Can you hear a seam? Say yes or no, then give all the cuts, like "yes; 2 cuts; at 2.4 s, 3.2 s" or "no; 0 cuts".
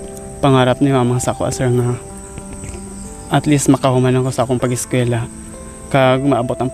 no; 0 cuts